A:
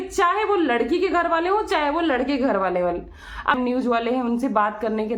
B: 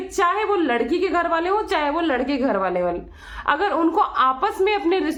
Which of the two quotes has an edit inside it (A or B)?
A